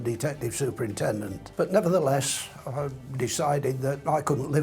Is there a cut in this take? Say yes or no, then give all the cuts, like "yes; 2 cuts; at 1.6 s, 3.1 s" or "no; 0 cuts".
yes; 1 cut; at 1.4 s